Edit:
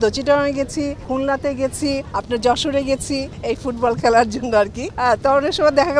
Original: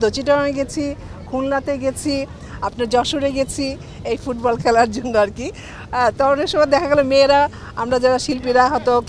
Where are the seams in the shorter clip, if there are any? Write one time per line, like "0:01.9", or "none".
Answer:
0:01.0
0:02.1
0:03.3
0:04.8